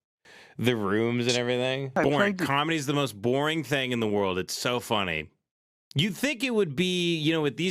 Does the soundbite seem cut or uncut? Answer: cut